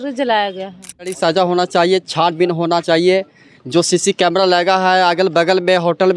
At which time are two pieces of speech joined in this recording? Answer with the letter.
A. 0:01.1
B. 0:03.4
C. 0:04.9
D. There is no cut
A